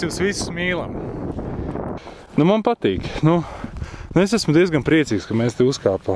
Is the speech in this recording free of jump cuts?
no; 1 cut; at 2.1 s

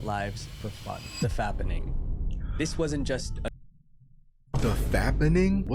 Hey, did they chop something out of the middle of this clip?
yes; 1 cut; at 4.4 s

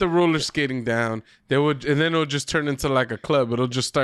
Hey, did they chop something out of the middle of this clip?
no; 0 cuts

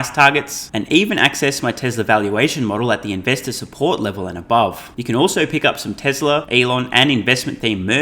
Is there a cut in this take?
yes; 2 cuts; at 4.9 s, 6.5 s

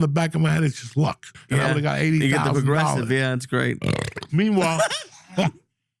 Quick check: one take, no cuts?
no; 1 cut; at 1.3 s

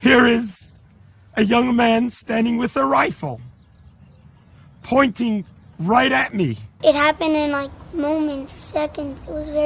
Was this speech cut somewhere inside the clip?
yes; 1 cut; at 6.8 s

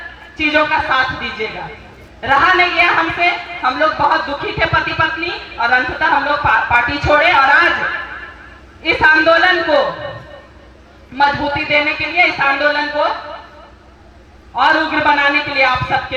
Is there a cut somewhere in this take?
no; 0 cuts

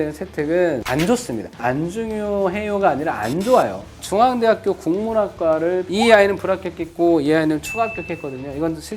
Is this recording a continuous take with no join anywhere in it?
no; 2 cuts; at 1.0 s, 5.9 s

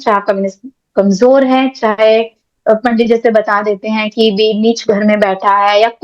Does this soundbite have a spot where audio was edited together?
no; 0 cuts

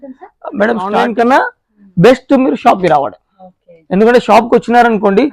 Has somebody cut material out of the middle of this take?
yes; 1 cut; at 1.0 s

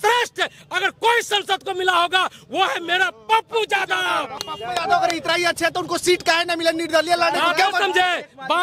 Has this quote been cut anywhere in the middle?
no; 0 cuts

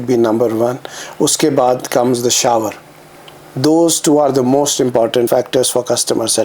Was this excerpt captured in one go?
no; 1 cut; at 5.3 s

